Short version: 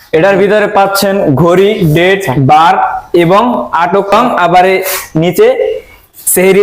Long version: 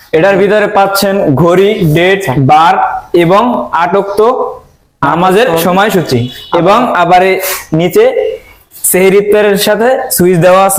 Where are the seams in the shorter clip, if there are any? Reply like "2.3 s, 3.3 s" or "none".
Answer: 4.1 s